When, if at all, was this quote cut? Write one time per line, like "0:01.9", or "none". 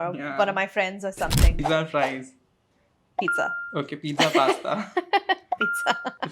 0:01.6